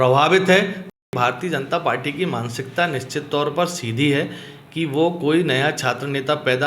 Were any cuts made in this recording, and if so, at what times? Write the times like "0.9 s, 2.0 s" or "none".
1.1 s